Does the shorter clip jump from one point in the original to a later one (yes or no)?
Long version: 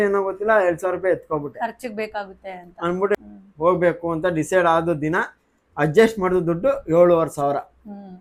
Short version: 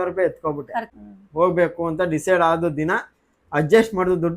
yes